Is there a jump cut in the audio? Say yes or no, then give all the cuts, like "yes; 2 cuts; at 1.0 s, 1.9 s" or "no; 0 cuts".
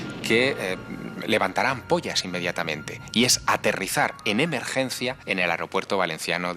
yes; 1 cut; at 5.2 s